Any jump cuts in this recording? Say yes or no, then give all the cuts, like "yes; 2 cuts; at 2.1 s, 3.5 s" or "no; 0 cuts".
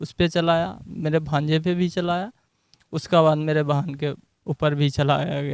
no; 0 cuts